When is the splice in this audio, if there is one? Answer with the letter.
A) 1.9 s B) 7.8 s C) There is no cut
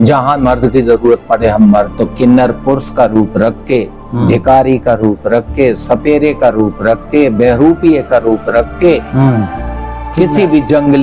A